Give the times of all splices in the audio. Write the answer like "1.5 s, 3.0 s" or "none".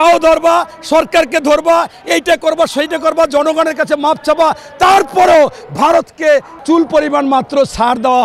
6.5 s

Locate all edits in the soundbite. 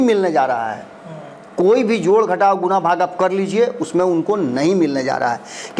none

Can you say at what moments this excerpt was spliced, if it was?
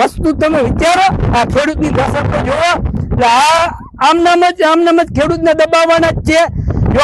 none

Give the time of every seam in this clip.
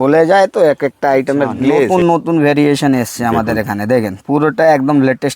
1.9 s

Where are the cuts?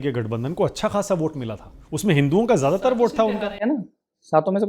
none

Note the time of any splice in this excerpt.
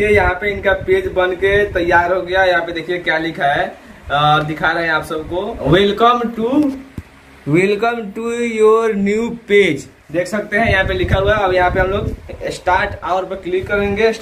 none

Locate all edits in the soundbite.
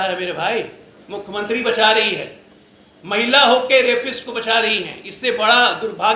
none

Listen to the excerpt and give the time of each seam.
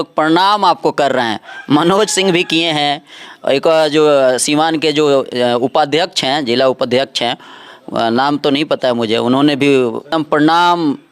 10.0 s

